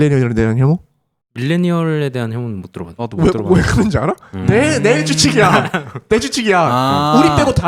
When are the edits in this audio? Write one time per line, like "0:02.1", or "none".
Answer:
0:04.3

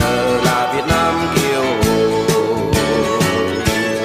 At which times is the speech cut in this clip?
none

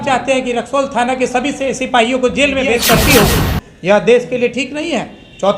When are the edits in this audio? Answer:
0:02.8

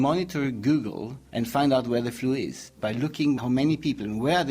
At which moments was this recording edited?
0:01.2
0:02.7

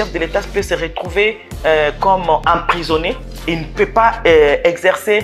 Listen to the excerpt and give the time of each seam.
none

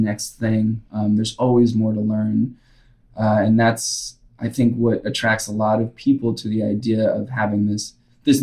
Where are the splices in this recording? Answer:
none

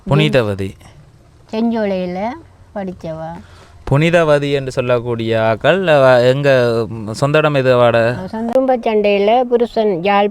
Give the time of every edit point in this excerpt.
0:08.5

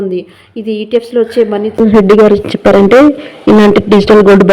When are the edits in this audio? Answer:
0:01.7

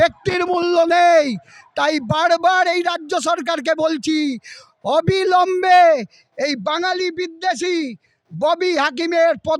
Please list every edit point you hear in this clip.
none

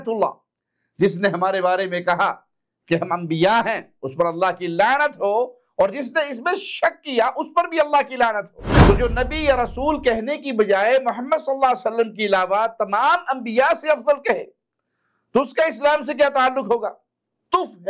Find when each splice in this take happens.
0:08.6

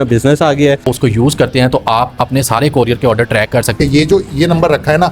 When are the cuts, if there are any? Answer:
0:00.8
0:03.7

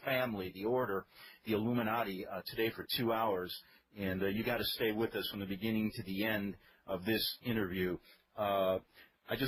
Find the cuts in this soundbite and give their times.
none

